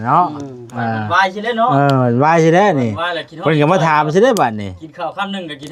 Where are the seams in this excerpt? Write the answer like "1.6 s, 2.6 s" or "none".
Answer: none